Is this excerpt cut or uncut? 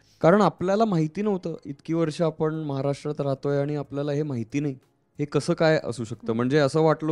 uncut